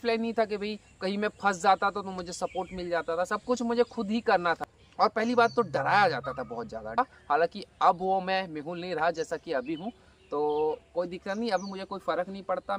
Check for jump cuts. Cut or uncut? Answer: cut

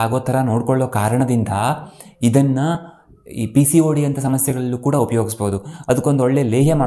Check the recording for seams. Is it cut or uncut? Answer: uncut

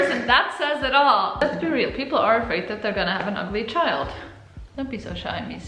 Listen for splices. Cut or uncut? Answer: cut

